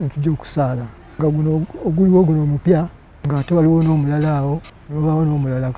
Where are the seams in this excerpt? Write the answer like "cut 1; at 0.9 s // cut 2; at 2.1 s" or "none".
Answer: cut 1; at 1.2 s // cut 2; at 2.7 s // cut 3; at 4.8 s